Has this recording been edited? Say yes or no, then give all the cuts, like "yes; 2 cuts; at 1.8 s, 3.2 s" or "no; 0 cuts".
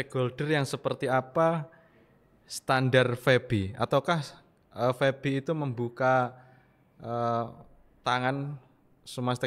no; 0 cuts